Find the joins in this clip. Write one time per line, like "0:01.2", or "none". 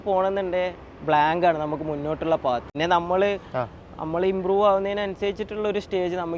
0:02.7